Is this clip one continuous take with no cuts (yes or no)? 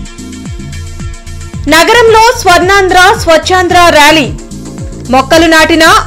yes